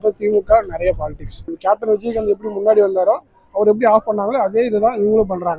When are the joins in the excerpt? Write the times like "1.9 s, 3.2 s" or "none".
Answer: 1.3 s